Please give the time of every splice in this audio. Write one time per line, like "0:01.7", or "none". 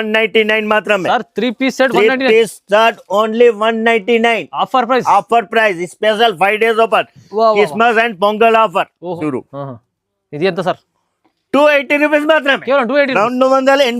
0:09.2